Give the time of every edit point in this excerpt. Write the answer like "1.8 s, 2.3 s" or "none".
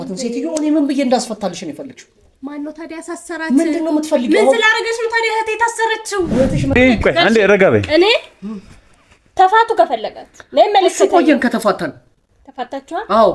6.8 s